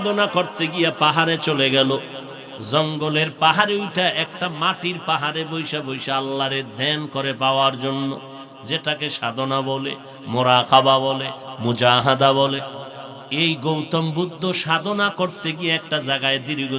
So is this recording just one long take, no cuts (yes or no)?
yes